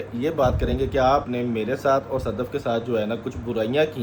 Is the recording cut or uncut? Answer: uncut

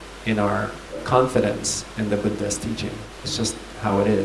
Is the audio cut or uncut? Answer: cut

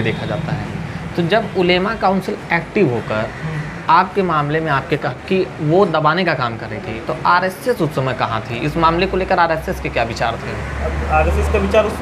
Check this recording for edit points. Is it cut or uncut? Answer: cut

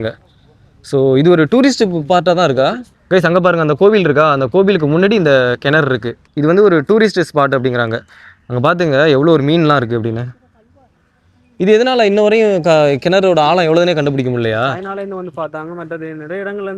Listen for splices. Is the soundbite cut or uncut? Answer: uncut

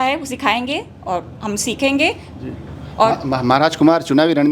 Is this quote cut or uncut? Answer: uncut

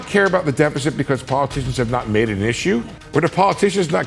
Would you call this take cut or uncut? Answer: cut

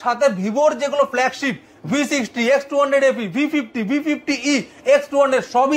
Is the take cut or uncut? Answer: uncut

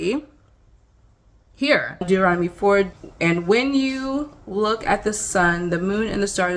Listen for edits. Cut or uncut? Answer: cut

